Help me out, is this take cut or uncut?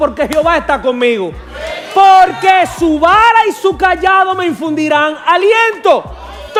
uncut